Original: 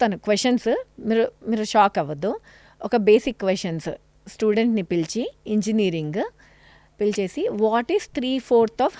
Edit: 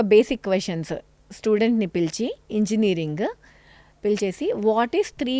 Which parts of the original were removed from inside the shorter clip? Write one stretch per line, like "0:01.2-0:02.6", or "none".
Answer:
none